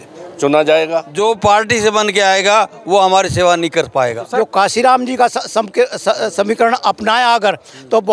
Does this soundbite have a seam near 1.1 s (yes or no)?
yes